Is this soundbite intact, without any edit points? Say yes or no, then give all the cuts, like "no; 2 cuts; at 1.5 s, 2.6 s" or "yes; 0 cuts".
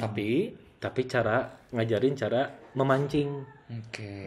yes; 0 cuts